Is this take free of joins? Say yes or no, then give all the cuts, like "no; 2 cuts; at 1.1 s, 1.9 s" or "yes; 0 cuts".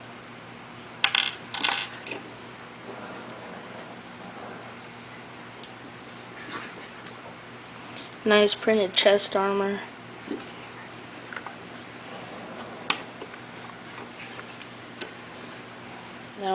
no; 1 cut; at 7.3 s